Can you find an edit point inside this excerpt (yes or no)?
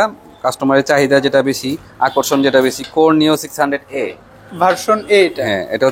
no